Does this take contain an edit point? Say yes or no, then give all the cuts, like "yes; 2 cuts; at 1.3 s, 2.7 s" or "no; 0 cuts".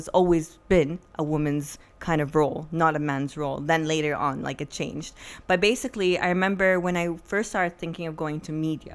no; 0 cuts